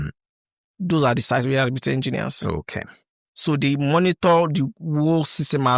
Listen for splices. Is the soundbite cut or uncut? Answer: uncut